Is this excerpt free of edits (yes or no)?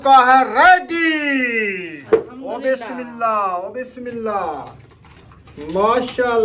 no